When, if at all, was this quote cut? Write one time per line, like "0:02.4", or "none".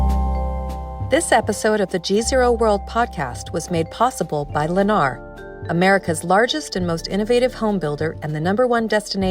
0:01.0